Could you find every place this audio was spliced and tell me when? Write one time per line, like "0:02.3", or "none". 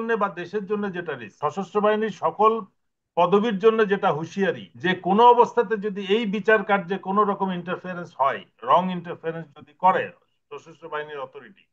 0:01.4
0:04.7